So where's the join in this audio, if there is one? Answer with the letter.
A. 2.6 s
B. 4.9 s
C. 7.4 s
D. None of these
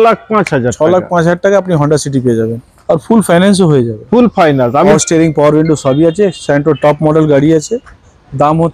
B